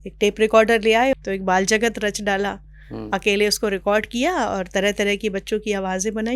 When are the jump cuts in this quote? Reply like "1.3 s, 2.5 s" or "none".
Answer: 1.1 s